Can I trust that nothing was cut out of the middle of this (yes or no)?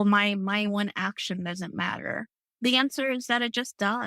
no